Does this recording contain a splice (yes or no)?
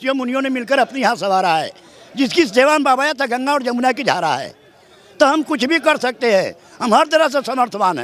no